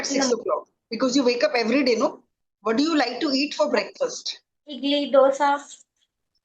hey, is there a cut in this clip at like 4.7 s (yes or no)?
yes